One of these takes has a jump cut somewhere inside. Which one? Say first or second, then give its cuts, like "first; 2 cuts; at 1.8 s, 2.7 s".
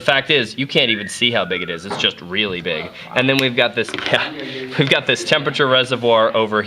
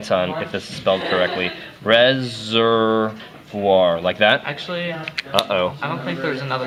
first; 1 cut; at 5.2 s